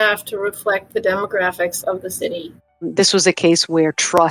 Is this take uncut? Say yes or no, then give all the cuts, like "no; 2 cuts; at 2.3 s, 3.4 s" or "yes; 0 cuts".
no; 1 cut; at 2.6 s